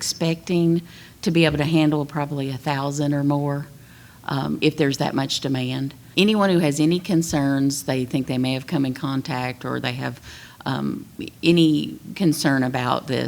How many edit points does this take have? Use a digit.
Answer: 1